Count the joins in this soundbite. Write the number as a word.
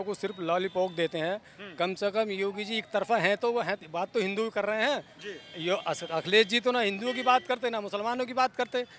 zero